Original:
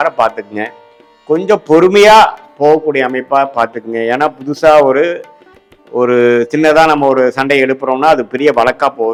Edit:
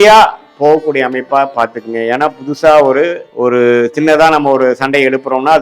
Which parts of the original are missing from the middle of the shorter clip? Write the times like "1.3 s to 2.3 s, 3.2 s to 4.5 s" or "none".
5.2 s to 5.8 s